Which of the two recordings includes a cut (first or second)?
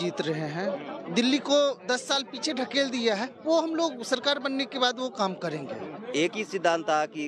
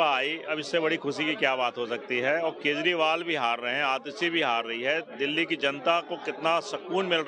first